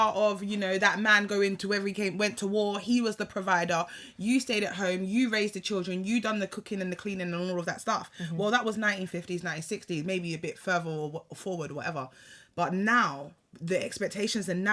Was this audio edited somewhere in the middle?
no; 0 cuts

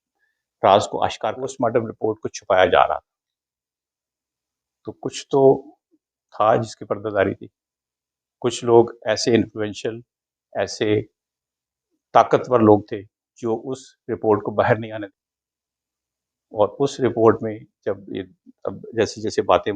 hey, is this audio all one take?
no; 2 cuts; at 1.5 s, 14.9 s

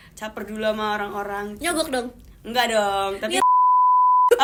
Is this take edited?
no; 0 cuts

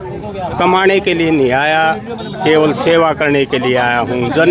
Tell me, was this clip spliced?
no; 0 cuts

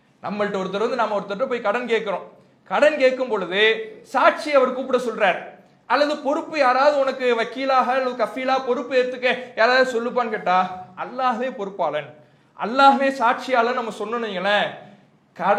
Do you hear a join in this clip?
no; 0 cuts

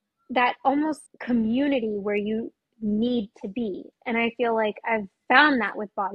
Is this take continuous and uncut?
no; 1 cut; at 1.1 s

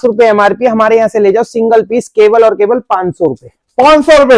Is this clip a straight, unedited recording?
yes; 0 cuts

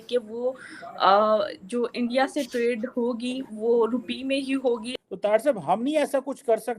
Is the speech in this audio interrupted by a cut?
yes; 1 cut; at 4.9 s

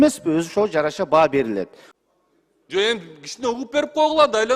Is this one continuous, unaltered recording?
no; 1 cut; at 1.8 s

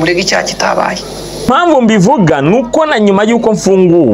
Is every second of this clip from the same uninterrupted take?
no; 1 cut; at 1.5 s

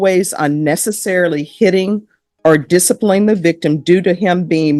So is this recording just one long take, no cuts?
yes; 0 cuts

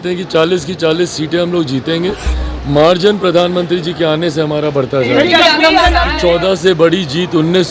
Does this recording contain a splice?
yes; 1 cut; at 6.1 s

